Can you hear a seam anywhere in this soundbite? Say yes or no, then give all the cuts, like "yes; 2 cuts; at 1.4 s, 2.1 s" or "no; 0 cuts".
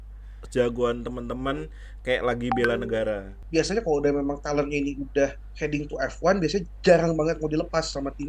yes; 1 cut; at 3.3 s